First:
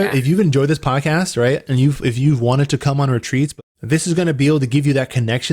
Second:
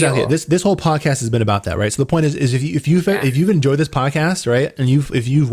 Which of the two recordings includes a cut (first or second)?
first